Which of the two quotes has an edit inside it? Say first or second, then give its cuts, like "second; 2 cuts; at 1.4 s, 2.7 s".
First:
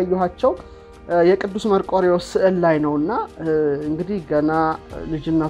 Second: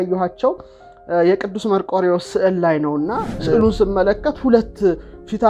second; 1 cut; at 3.4 s